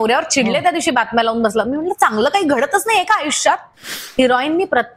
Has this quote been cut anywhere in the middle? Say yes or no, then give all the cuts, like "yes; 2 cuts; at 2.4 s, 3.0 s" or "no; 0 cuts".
yes; 1 cut; at 3.9 s